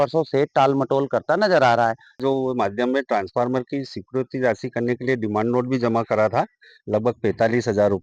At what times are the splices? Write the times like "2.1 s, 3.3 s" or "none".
2.2 s